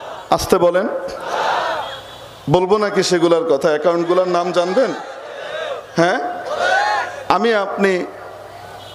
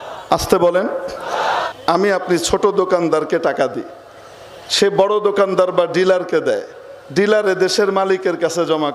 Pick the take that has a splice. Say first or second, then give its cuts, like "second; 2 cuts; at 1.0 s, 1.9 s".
second; 1 cut; at 1.7 s